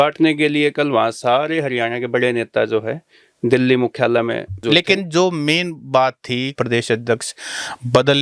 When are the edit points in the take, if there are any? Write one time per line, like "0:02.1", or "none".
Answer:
0:04.6
0:06.5